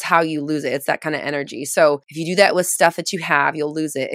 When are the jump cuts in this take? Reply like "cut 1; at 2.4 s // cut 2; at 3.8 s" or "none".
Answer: cut 1; at 2.1 s